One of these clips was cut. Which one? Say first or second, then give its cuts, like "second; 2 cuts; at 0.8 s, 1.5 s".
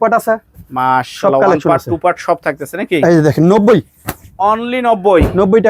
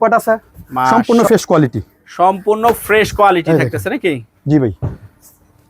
second; 1 cut; at 0.9 s